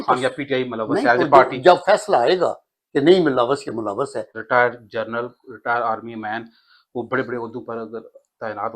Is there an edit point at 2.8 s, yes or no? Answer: no